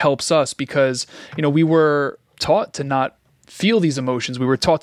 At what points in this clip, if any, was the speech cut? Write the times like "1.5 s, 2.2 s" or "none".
2.3 s

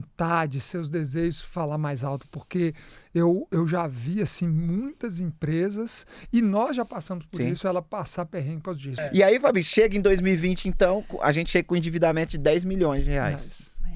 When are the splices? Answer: 8.9 s

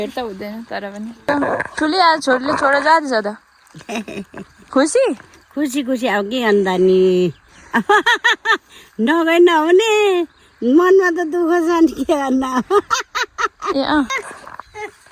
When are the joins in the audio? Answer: 1.3 s, 14.2 s

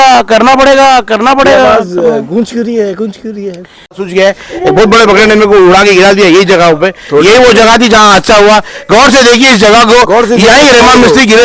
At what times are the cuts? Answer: 4.0 s

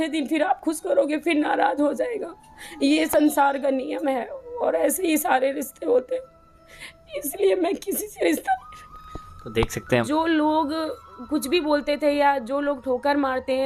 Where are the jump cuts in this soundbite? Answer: 10.0 s

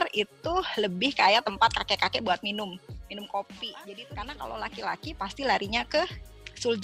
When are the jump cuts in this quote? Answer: 3.8 s

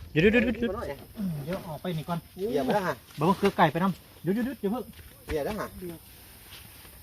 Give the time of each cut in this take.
1.0 s

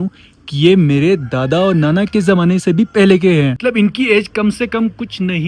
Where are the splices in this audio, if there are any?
3.6 s

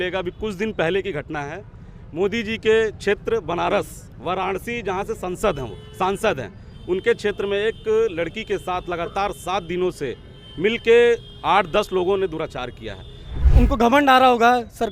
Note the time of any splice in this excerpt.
13.4 s

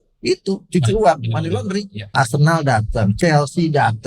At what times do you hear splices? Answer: 2.1 s

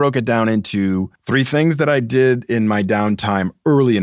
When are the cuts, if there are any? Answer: 1.2 s

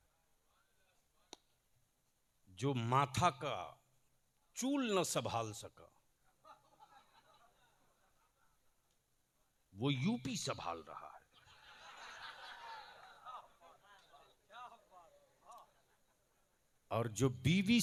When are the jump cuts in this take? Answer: none

